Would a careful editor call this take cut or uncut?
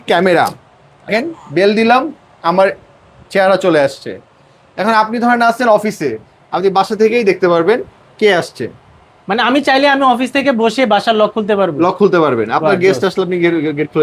uncut